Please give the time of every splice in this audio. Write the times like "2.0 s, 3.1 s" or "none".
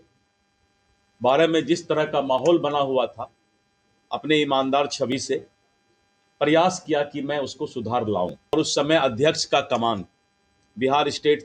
8.5 s